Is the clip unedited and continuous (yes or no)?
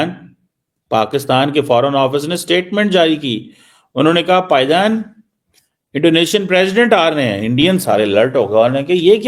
yes